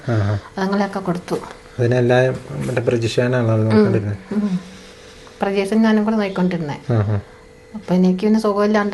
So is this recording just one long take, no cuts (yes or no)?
yes